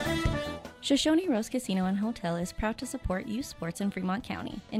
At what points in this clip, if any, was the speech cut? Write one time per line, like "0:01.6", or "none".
none